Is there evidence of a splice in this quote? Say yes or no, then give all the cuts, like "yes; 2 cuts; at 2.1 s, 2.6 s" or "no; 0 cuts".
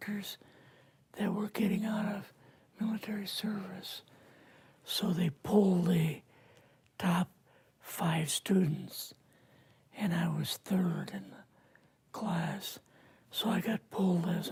no; 0 cuts